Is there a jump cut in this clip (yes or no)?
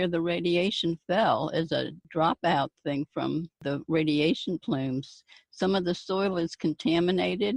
yes